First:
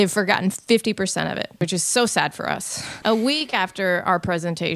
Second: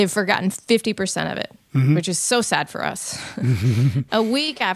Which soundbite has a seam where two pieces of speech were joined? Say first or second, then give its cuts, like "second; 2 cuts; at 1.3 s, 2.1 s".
first; 2 cuts; at 1.6 s, 3.0 s